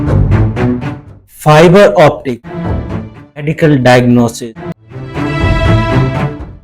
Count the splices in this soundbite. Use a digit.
2